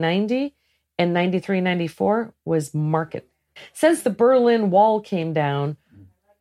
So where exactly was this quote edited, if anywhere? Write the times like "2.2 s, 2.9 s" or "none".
3.6 s

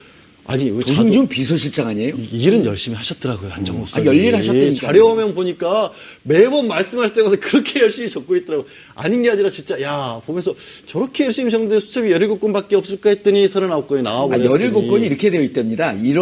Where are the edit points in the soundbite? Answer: 10.1 s

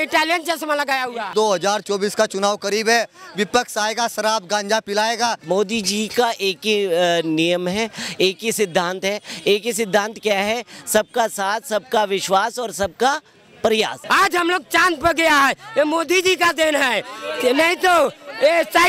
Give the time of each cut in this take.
1.3 s, 5.4 s, 14.0 s

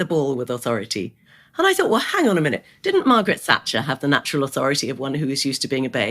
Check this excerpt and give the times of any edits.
1.4 s

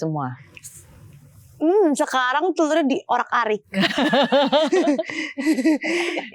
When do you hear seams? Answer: none

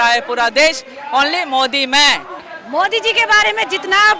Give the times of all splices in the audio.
2.4 s

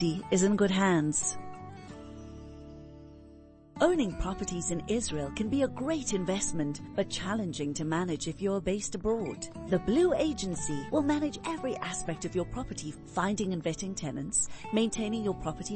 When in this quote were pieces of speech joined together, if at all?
1.2 s, 3.6 s

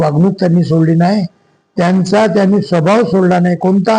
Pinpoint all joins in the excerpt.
none

